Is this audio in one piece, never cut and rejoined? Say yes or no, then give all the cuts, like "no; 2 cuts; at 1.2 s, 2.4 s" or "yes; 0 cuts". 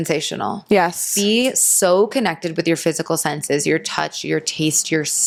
yes; 0 cuts